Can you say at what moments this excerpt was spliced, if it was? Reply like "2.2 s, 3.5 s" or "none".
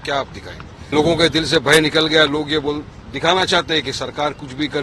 0.9 s